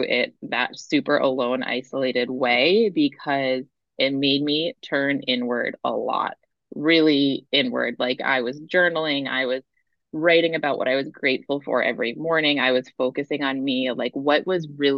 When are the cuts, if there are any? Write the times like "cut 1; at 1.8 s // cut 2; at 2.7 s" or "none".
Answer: cut 1; at 6.5 s